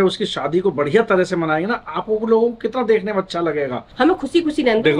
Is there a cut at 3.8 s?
yes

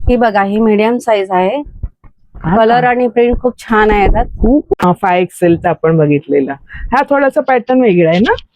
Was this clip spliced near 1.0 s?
no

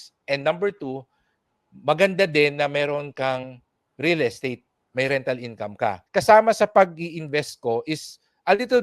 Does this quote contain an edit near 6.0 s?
yes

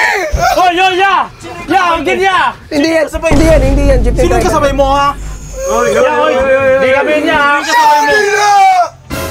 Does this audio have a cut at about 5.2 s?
no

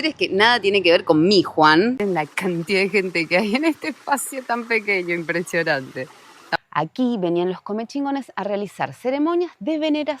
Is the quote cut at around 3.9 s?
no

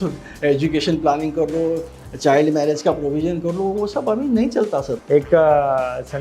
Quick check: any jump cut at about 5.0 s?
yes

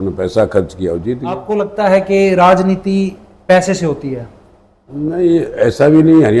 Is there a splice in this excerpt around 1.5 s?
yes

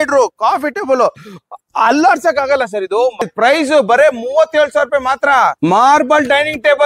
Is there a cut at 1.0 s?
no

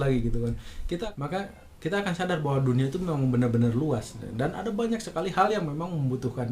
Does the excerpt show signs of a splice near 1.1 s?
yes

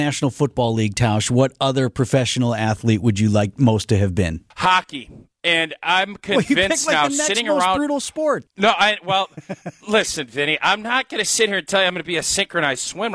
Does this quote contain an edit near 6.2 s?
no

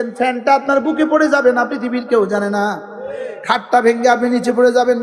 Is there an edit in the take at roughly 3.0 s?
no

